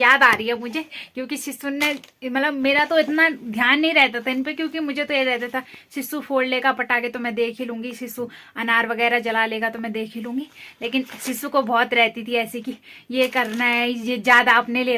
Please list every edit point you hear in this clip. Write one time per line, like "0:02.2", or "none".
none